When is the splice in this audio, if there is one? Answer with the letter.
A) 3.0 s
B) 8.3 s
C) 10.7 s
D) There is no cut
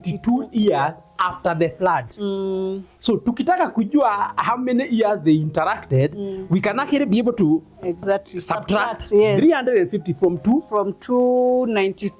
D